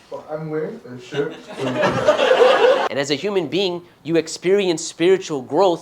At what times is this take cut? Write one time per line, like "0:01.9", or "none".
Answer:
0:02.9